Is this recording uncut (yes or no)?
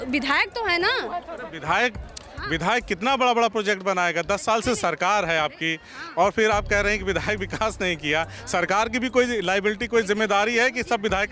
yes